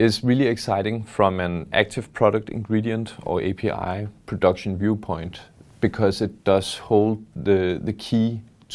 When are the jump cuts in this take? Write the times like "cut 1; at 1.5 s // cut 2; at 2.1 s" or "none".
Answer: none